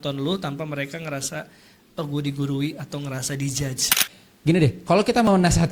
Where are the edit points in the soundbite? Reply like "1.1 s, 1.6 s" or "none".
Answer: 4.1 s